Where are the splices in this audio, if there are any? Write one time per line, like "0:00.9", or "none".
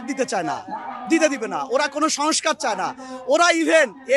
none